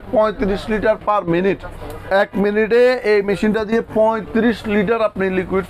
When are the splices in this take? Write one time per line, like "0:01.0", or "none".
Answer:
none